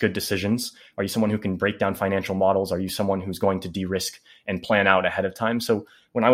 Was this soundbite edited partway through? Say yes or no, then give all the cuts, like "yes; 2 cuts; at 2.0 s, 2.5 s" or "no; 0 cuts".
no; 0 cuts